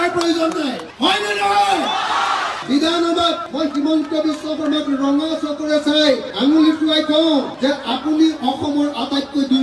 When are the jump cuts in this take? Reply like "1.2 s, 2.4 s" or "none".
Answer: 2.5 s